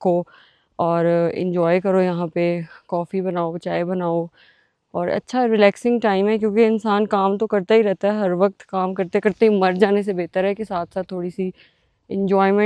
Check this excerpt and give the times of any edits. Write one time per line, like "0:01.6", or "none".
none